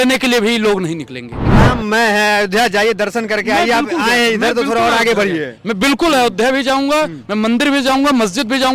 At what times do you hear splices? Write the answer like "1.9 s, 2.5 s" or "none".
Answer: 1.4 s